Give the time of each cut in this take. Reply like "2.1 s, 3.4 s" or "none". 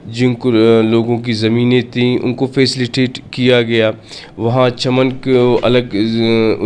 none